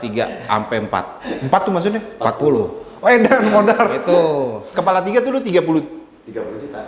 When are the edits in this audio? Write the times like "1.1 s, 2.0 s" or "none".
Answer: none